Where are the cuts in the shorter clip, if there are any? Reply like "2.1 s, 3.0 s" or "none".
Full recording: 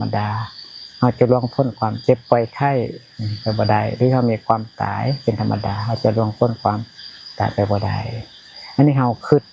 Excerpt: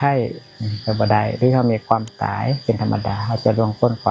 none